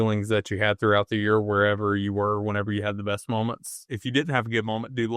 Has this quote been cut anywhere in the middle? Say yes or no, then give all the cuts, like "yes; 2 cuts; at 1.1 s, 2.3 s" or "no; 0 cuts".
yes; 1 cut; at 4.0 s